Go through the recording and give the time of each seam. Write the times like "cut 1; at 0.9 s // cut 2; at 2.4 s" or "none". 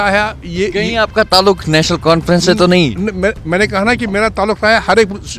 none